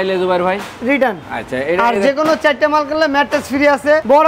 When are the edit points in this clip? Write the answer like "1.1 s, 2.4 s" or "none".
none